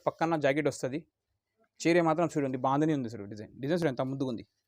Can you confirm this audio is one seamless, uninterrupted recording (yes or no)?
yes